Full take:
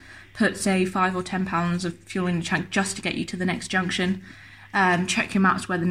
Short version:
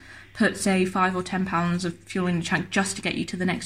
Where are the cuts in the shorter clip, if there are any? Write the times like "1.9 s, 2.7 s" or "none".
none